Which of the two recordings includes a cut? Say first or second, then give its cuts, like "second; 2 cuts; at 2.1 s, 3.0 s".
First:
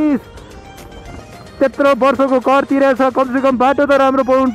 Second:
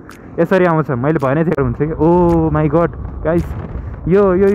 second; 1 cut; at 1.6 s